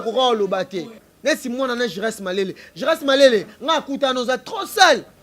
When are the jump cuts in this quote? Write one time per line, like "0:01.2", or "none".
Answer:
0:01.0